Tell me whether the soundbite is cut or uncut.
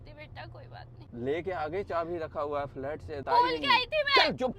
cut